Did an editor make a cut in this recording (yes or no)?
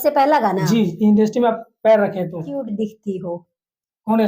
yes